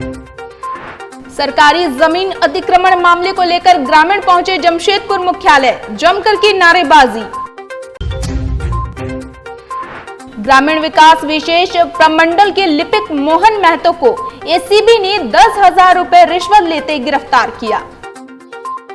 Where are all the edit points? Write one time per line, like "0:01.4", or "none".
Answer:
0:01.1

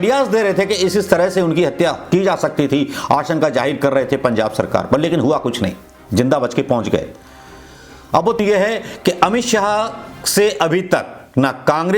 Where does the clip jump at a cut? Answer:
0:08.4

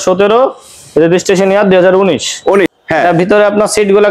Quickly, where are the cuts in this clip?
0:02.8

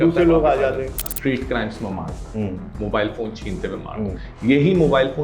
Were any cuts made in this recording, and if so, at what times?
0:01.0

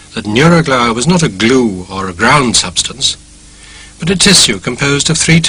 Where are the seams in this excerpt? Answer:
none

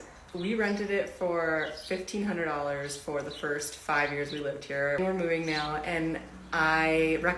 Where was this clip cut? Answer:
0:05.0

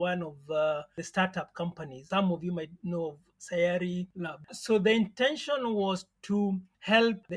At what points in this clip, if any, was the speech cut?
0:01.0
0:04.5

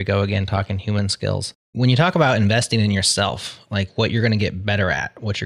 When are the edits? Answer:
0:01.6

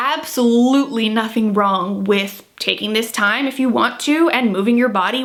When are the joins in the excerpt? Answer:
none

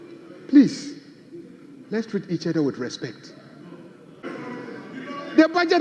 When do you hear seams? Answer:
0:04.2

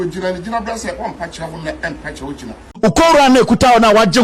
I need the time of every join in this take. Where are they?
0:02.6

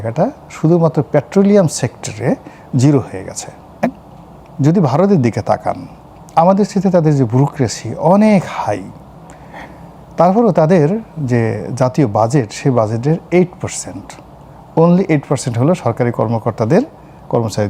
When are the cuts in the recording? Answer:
0:03.8

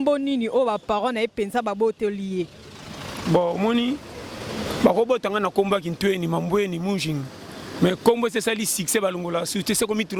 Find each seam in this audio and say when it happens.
none

